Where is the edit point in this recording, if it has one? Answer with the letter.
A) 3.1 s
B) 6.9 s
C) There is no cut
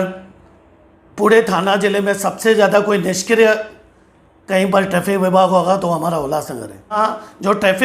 B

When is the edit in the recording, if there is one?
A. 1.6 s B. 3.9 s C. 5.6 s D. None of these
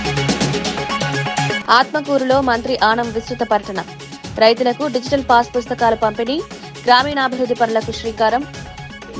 A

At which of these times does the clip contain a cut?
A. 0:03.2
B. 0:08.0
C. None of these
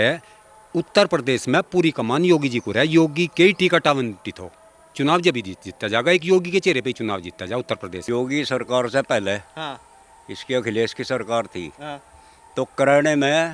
B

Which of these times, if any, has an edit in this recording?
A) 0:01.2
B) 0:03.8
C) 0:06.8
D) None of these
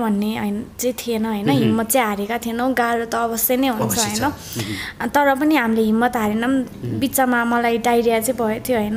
D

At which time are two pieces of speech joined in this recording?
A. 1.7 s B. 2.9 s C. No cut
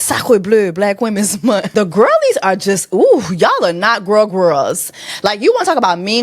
A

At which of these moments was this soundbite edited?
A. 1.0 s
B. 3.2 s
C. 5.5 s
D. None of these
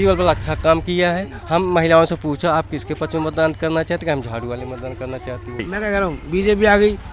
C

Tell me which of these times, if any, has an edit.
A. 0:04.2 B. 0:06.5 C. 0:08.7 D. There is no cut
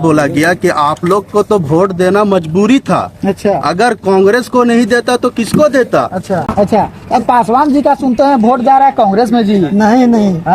B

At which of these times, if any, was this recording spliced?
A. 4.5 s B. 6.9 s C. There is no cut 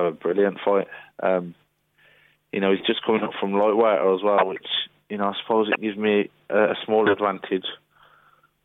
C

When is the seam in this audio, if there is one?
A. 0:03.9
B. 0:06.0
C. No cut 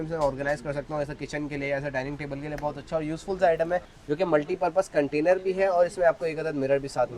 A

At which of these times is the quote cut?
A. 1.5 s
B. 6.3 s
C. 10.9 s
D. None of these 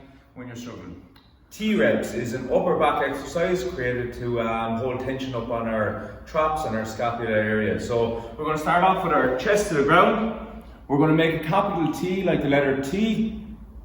A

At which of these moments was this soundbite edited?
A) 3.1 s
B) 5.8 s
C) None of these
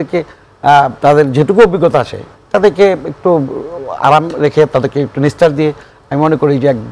C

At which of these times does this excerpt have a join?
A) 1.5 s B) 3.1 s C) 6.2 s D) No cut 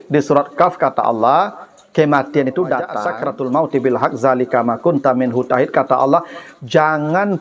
B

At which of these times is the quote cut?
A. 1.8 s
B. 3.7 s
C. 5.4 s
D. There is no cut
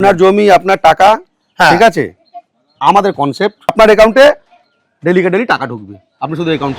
B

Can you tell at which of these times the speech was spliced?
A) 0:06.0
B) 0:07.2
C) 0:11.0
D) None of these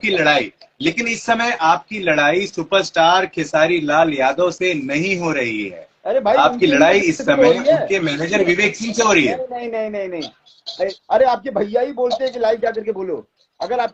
C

